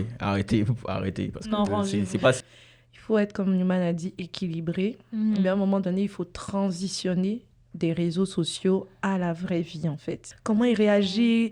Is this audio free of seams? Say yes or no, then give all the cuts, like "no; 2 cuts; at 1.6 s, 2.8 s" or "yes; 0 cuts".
no; 2 cuts; at 2.4 s, 10.3 s